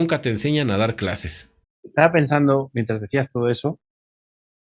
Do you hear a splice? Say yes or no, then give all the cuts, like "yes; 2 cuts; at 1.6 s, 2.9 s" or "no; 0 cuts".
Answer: no; 0 cuts